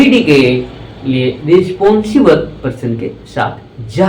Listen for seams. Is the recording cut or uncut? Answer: uncut